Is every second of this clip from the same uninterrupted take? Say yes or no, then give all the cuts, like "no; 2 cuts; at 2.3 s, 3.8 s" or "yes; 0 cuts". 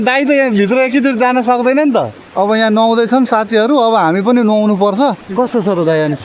no; 2 cuts; at 2.2 s, 5.2 s